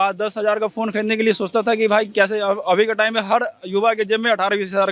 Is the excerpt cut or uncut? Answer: uncut